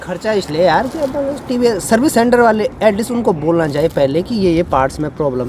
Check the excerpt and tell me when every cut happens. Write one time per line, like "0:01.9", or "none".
none